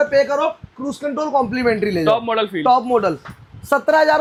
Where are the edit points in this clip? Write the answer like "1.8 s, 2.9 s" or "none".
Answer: none